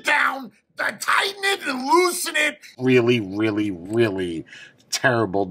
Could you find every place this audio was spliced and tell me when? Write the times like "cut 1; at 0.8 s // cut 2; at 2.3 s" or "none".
cut 1; at 2.7 s